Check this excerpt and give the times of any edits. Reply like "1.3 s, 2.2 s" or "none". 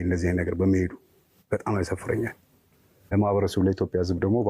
3.0 s